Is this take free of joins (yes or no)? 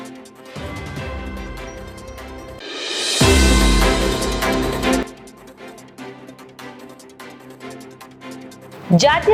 yes